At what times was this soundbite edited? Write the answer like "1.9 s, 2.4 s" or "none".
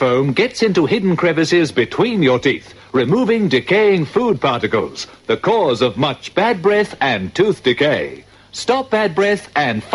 none

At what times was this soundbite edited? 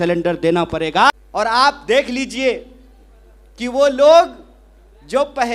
1.1 s

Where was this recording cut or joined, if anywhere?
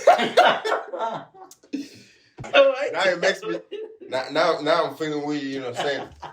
2.3 s

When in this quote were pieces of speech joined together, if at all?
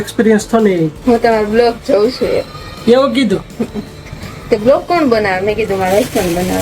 0.9 s

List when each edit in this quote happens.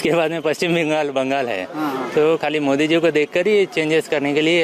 none

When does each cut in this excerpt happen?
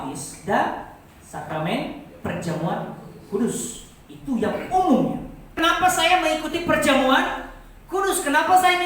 5.6 s

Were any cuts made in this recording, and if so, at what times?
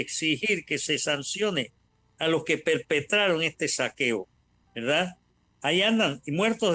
none

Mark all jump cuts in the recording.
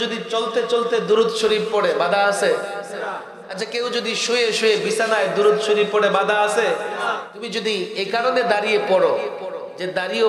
7.3 s

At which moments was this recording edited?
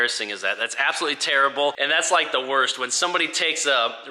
1.8 s

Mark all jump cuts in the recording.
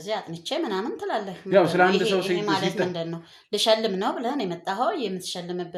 none

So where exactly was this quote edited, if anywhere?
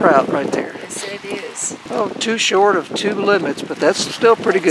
1.9 s

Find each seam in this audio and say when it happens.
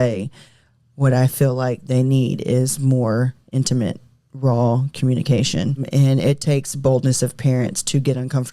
5.8 s

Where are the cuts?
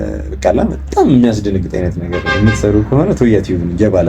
none

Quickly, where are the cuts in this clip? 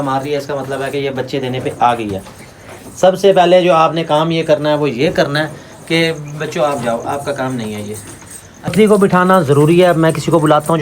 8.7 s

